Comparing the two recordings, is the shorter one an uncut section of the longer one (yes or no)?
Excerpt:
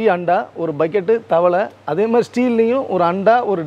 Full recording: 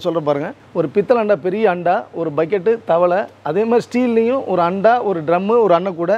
yes